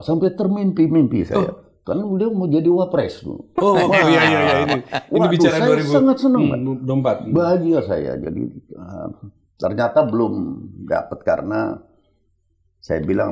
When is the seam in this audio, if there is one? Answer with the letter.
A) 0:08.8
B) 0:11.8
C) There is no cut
C